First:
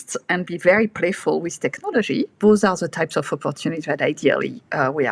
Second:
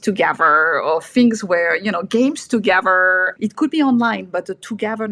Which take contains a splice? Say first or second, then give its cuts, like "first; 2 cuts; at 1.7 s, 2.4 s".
first; 1 cut; at 2.4 s